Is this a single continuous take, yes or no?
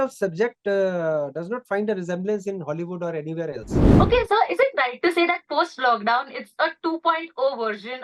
no